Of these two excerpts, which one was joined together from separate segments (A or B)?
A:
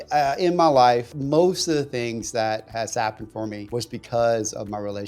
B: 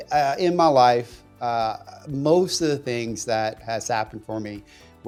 A